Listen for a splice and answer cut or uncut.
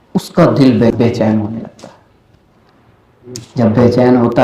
cut